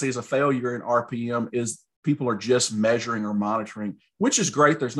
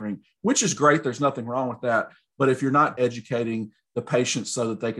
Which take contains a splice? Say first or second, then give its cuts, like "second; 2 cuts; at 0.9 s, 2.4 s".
second; 1 cut; at 2.9 s